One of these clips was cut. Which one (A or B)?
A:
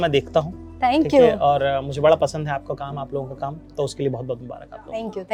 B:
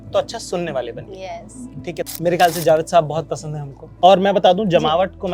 B